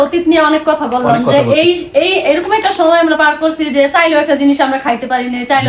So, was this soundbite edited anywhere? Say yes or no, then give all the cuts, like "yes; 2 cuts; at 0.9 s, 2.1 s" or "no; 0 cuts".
no; 0 cuts